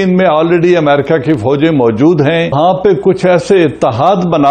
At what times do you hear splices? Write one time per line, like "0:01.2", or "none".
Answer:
0:02.5